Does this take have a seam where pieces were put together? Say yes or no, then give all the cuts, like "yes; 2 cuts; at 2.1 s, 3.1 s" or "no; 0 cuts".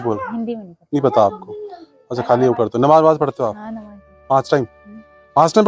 no; 0 cuts